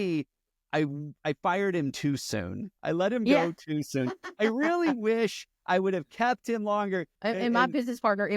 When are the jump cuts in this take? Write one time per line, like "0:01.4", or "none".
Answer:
0:07.1